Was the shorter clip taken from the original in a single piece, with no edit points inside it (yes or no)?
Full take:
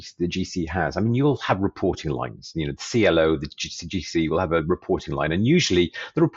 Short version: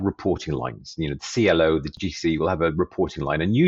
no